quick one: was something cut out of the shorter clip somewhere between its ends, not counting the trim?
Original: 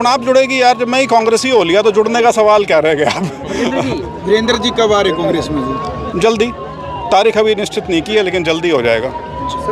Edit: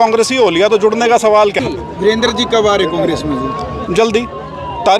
yes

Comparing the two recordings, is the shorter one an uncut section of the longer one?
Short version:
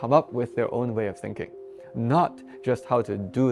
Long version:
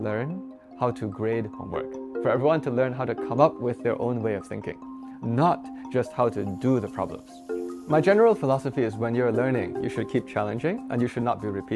yes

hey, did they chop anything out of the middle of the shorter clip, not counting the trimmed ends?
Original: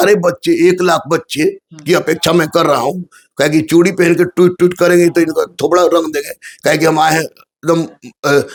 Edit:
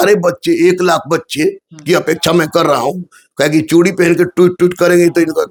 no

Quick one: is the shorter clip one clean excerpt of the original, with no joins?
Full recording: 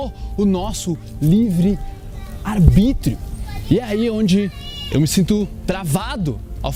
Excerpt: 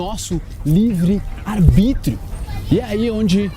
no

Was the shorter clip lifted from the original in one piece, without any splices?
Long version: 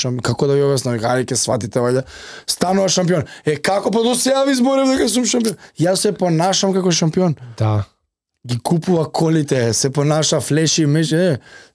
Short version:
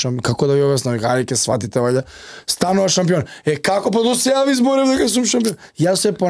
yes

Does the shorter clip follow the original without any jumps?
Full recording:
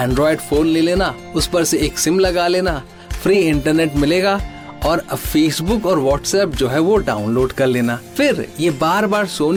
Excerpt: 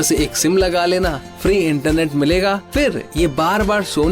no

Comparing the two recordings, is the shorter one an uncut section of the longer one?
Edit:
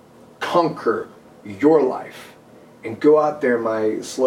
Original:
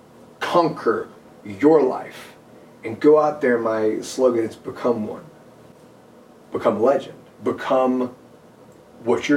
yes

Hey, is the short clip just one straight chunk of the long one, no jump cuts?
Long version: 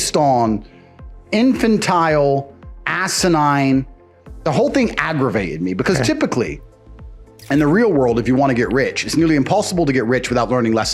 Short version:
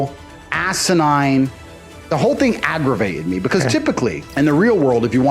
no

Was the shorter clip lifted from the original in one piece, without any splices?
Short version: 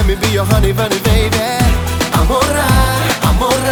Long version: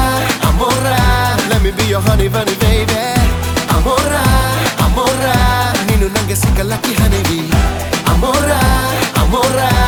yes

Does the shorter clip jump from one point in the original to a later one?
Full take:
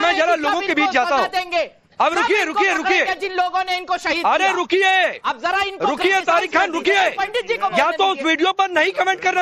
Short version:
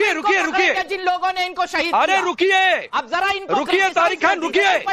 no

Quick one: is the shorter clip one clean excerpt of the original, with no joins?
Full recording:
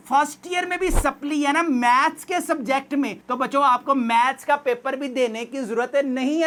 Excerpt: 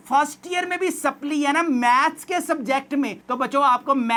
yes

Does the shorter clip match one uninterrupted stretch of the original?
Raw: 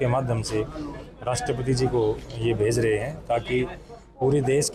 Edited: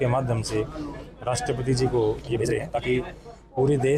no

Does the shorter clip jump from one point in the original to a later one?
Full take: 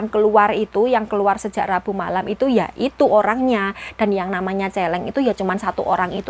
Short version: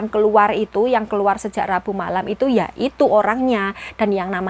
no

